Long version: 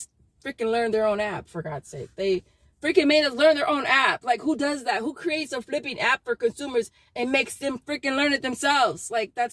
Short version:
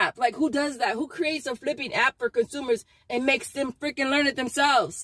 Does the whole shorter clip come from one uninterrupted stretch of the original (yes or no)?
yes